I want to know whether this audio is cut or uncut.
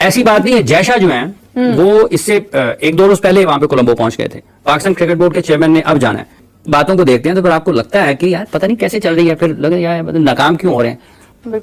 uncut